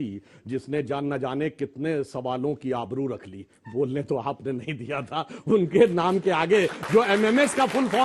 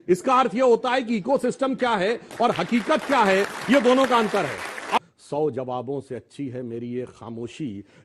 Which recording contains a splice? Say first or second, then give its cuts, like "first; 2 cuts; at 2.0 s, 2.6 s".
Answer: second; 1 cut; at 5.0 s